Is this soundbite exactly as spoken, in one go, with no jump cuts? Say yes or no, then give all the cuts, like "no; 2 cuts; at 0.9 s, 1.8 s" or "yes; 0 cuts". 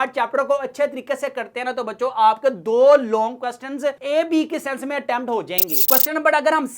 yes; 0 cuts